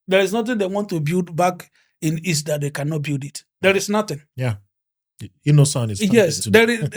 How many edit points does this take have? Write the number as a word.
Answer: zero